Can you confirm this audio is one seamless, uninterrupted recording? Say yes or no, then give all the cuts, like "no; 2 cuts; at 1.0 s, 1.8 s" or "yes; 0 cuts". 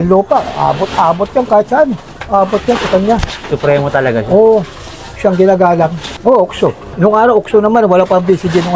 yes; 0 cuts